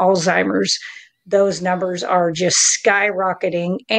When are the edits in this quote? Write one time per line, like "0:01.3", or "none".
none